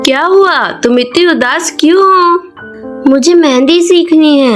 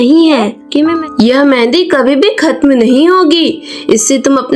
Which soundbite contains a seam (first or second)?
second